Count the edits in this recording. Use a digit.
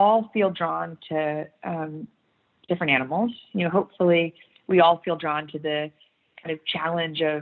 0